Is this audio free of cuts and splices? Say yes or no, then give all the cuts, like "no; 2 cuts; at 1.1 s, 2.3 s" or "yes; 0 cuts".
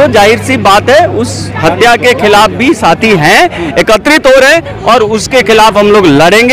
yes; 0 cuts